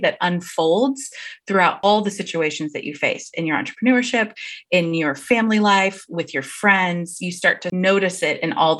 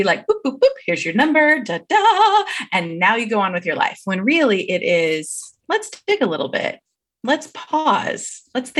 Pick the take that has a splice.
first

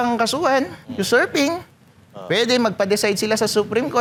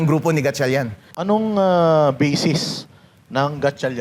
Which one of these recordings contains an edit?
second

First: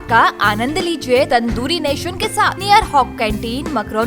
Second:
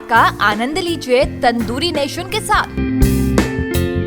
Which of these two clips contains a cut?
first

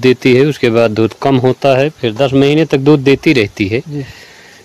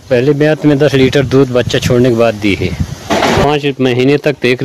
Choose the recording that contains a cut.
second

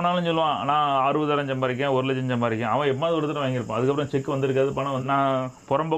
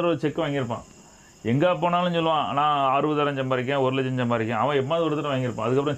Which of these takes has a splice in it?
first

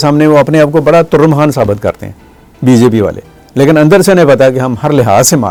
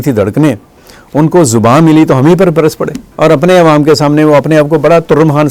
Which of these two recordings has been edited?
second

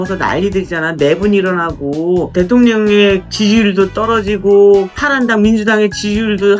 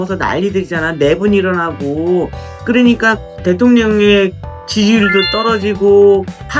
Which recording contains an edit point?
first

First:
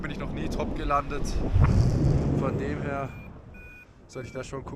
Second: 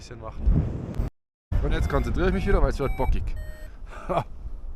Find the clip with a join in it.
second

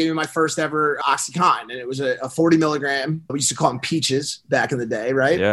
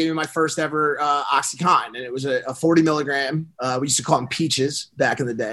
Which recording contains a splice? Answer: first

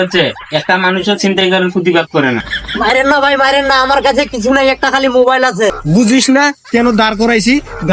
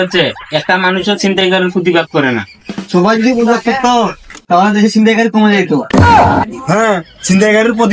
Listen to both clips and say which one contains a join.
first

